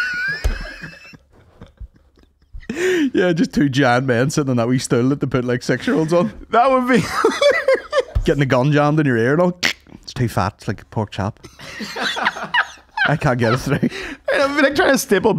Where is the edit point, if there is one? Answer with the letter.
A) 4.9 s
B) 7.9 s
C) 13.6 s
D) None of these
D